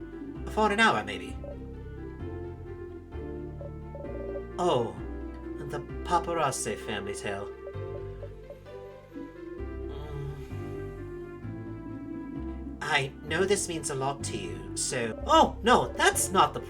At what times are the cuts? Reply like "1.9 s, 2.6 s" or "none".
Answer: 15.1 s

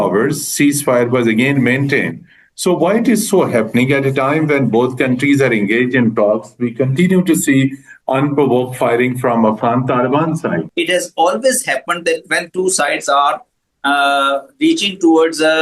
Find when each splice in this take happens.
10.7 s

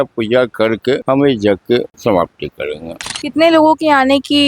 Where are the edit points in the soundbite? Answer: 1.0 s, 1.9 s

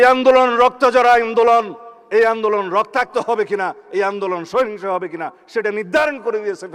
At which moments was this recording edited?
none

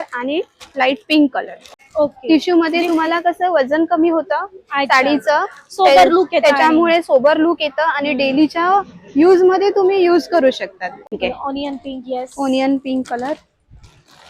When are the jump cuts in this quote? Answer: 1.6 s, 11.1 s

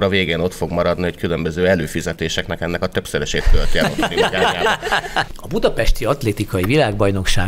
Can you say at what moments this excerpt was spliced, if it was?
5.3 s

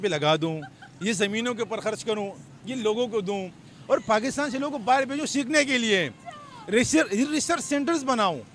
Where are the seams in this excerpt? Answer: none

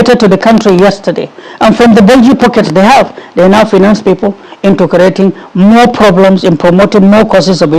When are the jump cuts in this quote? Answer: none

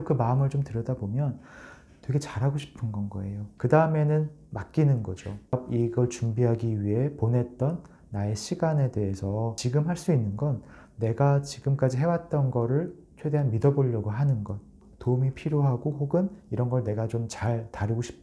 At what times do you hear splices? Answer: 3.4 s, 9.6 s, 14.9 s

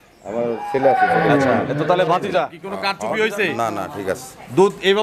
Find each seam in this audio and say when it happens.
2.6 s

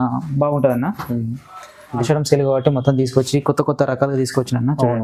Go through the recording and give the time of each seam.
2.0 s

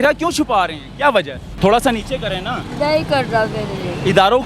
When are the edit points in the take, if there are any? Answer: 1.4 s

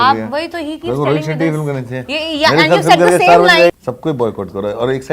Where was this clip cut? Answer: 3.7 s

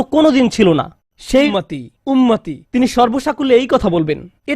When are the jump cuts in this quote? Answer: 1.5 s

